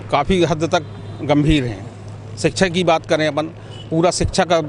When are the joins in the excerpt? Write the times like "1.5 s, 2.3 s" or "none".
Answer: none